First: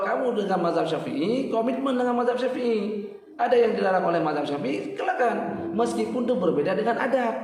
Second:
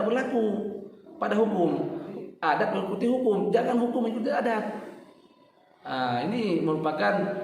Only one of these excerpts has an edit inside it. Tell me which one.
second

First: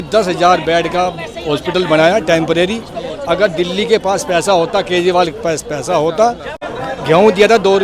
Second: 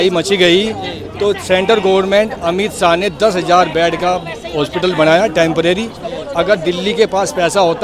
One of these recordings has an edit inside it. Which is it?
first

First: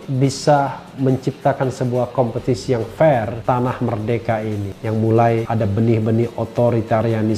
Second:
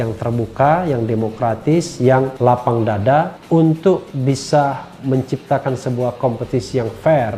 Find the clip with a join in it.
first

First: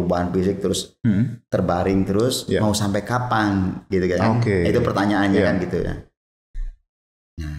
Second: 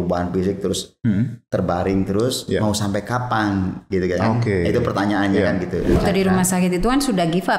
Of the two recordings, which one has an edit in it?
second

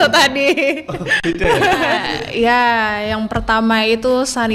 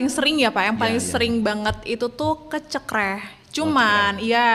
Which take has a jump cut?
first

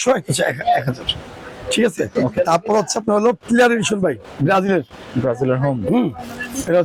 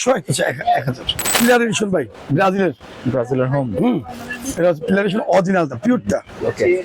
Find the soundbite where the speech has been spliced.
second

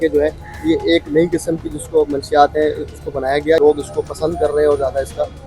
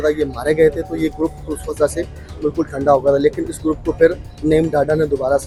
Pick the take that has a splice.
first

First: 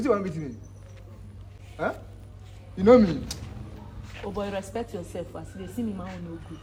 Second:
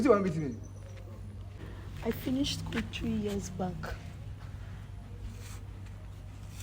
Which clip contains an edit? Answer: second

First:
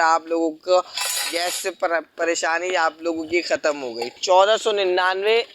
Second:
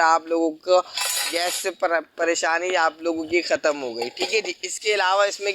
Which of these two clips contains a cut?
first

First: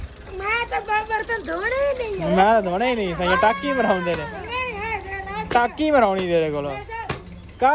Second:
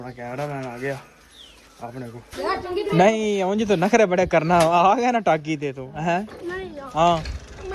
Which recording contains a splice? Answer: second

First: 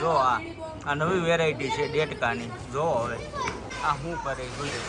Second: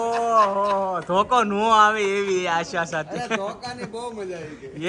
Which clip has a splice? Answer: first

